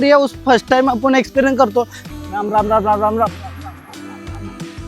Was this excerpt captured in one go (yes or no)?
no